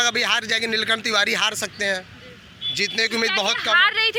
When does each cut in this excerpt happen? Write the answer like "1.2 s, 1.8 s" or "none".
none